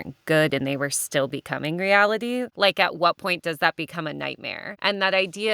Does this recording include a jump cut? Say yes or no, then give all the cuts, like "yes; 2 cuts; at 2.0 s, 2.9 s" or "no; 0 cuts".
yes; 2 cuts; at 2.5 s, 4.6 s